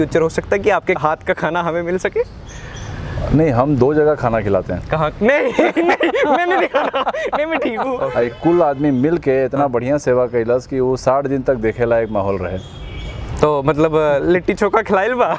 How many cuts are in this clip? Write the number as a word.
two